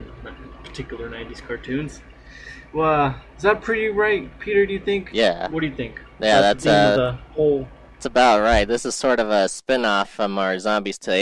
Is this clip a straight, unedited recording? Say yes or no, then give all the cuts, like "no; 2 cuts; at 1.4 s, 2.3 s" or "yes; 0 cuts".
no; 1 cut; at 4.1 s